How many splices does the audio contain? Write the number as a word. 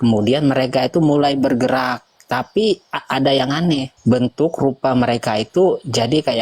one